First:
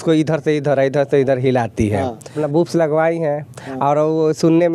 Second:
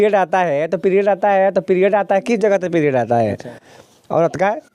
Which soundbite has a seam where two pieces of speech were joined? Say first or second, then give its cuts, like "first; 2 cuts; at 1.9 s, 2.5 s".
first; 1 cut; at 2.4 s